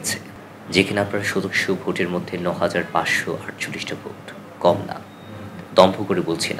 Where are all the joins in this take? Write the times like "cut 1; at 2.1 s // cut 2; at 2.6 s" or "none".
none